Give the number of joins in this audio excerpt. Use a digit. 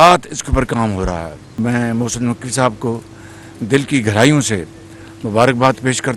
1